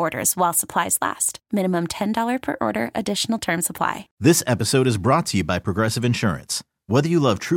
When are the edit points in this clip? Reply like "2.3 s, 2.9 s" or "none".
4.1 s